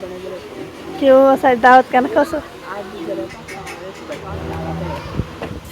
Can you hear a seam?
yes; 1 cut; at 4.3 s

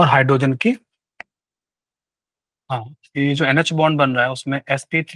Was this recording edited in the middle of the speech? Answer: no; 0 cuts

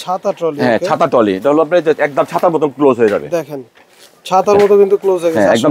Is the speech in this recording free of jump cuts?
yes; 0 cuts

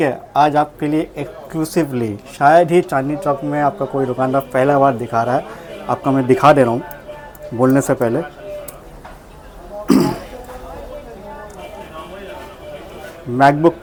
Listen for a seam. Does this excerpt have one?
no; 0 cuts

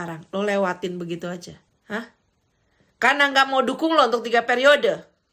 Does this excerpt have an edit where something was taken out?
yes; 1 cut; at 1.7 s

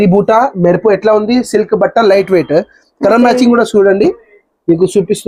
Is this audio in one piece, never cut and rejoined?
yes; 0 cuts

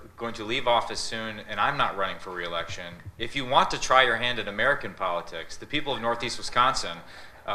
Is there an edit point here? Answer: no; 0 cuts

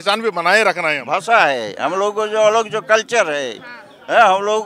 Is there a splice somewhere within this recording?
yes; 1 cut; at 1.0 s

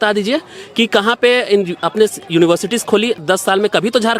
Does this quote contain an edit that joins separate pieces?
yes; 1 cut; at 3.2 s

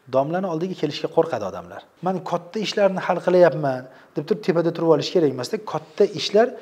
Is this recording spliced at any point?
yes; 1 cut; at 1.8 s

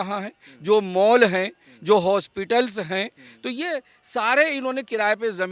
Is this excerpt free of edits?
yes; 0 cuts

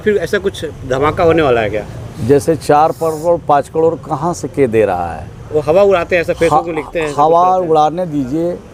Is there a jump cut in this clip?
no; 0 cuts

